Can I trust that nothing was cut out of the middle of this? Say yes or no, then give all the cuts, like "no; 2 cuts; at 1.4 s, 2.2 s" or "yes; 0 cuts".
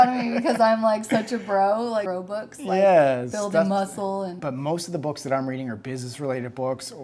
no; 2 cuts; at 2.1 s, 4.4 s